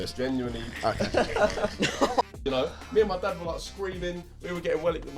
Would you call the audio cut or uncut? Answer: cut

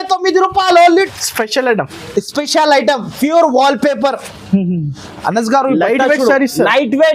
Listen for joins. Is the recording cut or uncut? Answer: cut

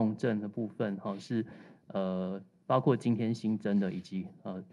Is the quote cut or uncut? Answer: uncut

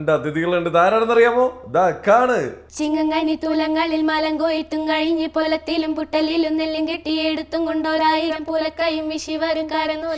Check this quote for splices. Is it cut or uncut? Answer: uncut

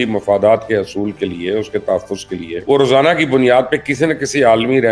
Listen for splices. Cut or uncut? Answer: cut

